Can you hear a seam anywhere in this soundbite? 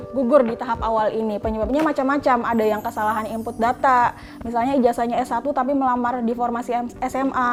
no; 0 cuts

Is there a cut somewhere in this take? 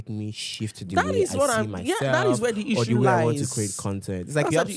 no; 0 cuts

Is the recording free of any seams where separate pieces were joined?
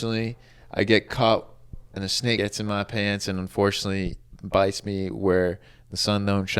no; 1 cut; at 2.4 s

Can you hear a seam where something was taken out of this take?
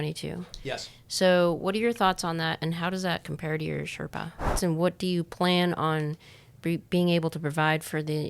yes; 1 cut; at 4.6 s

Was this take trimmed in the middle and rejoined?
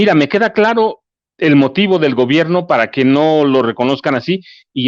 no; 0 cuts

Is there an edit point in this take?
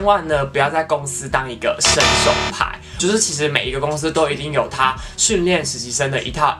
yes; 1 cut; at 3.0 s

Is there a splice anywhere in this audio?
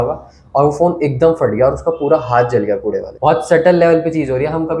no; 0 cuts

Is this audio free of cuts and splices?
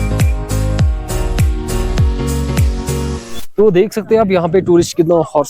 no; 1 cut; at 3.3 s

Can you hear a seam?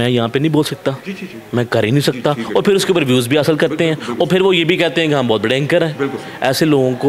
no; 0 cuts

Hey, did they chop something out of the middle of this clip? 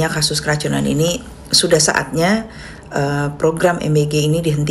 no; 0 cuts

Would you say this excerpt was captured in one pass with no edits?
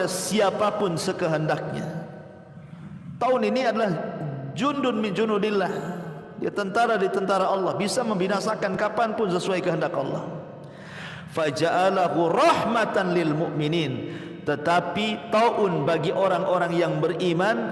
yes; 0 cuts

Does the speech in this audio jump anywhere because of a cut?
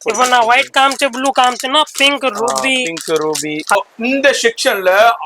yes; 1 cut; at 3.8 s

